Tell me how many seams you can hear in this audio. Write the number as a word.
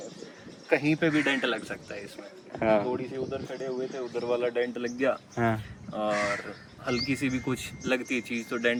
zero